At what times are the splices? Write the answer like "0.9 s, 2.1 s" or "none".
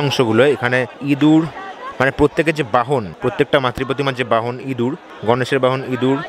0.9 s, 3.1 s, 5.1 s